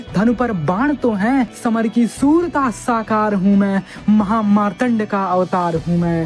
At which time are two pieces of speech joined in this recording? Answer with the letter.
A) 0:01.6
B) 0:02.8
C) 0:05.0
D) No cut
A